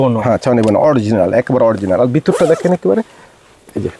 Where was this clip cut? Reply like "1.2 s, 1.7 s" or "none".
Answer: none